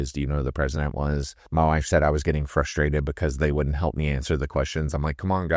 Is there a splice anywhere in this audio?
yes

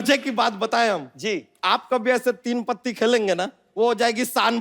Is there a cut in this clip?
yes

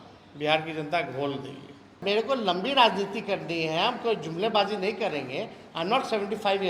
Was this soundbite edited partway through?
yes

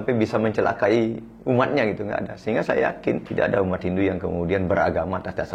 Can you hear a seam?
yes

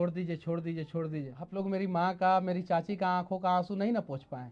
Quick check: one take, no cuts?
no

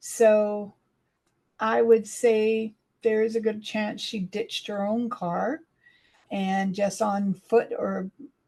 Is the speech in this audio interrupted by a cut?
no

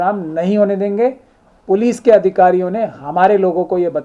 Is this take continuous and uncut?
yes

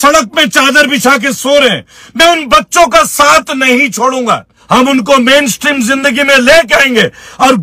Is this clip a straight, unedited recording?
no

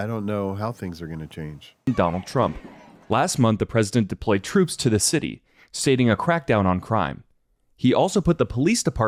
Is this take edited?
no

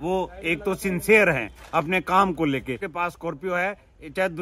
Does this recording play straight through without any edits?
no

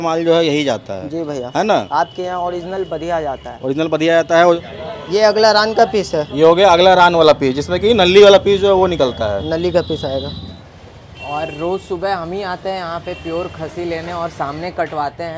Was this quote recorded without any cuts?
no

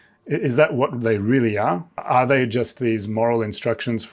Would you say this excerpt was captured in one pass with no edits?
no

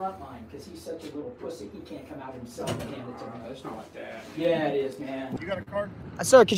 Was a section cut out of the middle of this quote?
yes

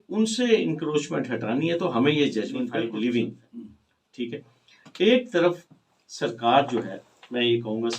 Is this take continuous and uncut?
no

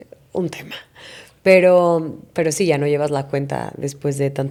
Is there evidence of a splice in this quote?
no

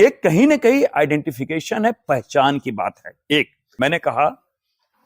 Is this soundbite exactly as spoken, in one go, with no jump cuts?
no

